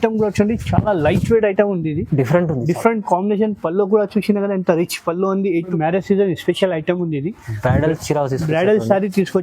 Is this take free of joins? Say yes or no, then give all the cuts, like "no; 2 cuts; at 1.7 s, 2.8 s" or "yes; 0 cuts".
no; 1 cut; at 5.7 s